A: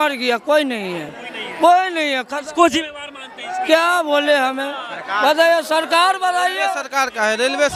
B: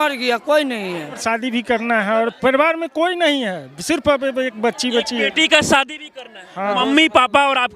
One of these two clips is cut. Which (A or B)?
B